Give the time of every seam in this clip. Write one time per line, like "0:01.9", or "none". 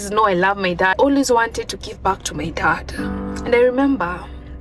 0:01.0